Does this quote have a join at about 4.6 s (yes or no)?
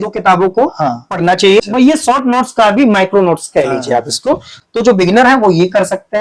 yes